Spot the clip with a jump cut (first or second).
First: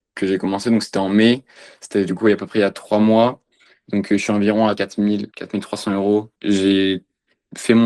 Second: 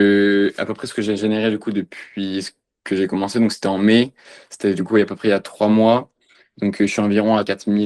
first